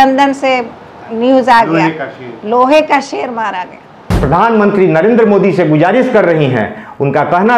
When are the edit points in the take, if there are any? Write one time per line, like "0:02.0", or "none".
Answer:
0:04.1

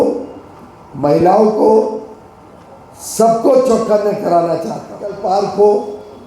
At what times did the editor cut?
0:05.2

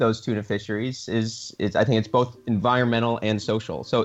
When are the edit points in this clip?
none

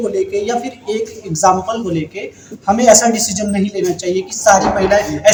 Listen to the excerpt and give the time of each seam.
none

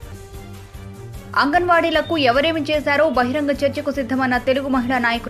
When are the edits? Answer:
none

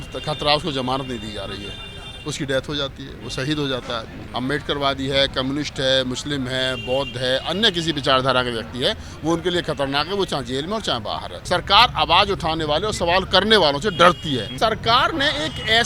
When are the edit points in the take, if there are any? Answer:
0:04.2
0:11.3
0:14.5

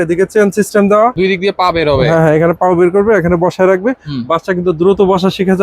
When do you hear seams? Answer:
0:01.1

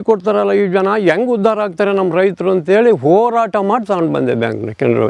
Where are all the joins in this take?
none

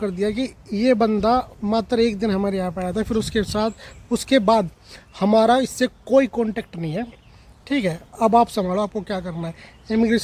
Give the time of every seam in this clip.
none

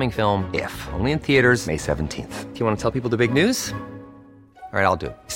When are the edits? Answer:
none

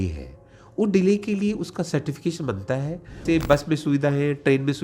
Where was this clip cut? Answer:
0:03.2

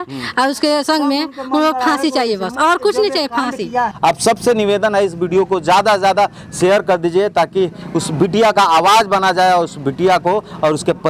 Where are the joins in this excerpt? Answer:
0:03.9

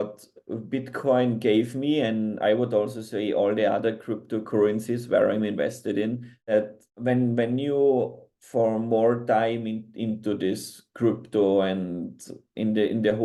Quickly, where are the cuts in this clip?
none

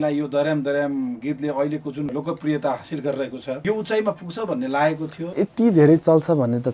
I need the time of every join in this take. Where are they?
0:02.1
0:03.6
0:05.4

